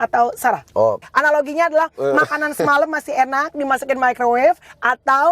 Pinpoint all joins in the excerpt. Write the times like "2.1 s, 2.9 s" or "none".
1.0 s